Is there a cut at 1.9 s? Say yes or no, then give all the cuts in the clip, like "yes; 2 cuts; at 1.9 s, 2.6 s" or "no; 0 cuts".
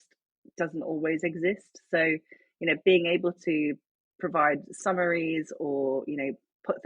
no; 0 cuts